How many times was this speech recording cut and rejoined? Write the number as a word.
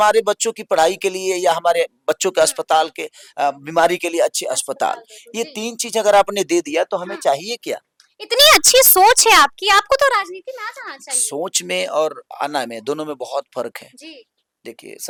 zero